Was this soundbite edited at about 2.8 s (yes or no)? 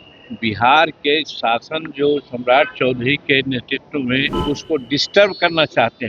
no